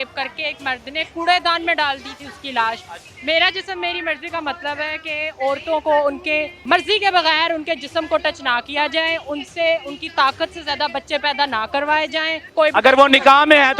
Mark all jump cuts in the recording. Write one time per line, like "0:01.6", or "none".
0:02.9
0:06.5
0:12.5